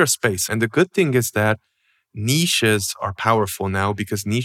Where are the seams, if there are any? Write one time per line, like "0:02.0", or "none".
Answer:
none